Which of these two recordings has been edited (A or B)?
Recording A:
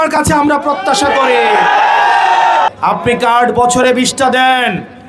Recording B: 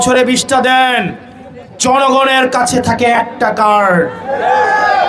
A